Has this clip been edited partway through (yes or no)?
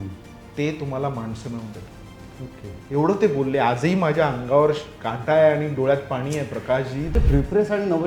yes